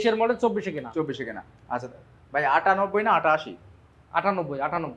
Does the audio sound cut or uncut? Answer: uncut